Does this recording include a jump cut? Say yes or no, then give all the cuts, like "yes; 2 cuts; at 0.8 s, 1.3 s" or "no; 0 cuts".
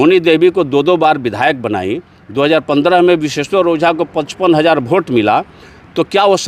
no; 0 cuts